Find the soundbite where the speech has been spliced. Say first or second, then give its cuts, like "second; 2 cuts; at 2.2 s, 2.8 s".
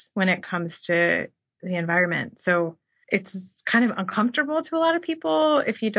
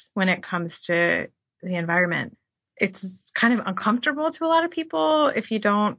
second; 1 cut; at 2.4 s